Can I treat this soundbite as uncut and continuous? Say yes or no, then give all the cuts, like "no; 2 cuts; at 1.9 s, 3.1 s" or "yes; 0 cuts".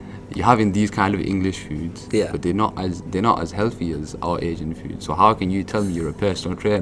yes; 0 cuts